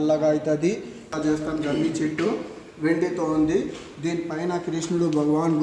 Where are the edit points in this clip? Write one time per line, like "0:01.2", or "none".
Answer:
0:01.1